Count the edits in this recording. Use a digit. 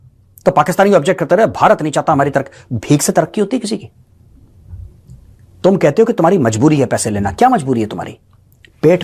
0